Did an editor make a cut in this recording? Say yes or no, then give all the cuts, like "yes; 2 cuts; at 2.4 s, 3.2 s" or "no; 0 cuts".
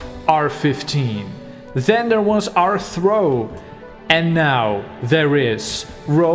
no; 0 cuts